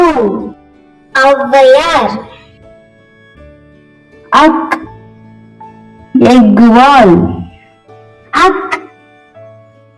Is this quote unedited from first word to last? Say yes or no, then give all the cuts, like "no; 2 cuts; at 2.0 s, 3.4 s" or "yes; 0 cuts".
no; 2 cuts; at 2.4 s, 3.8 s